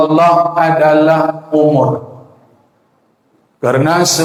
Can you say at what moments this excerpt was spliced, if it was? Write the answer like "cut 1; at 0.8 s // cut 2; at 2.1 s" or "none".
none